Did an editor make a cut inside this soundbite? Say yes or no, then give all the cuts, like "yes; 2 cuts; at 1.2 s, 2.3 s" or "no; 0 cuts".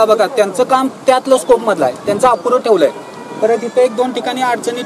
no; 0 cuts